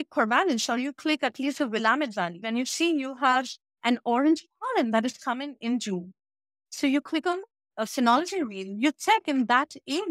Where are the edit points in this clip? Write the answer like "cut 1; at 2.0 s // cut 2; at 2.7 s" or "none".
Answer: cut 1; at 2.4 s